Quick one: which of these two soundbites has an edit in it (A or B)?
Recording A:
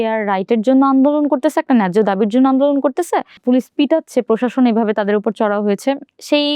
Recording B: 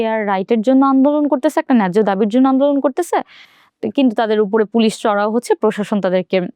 A